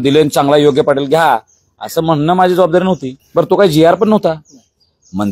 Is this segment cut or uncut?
cut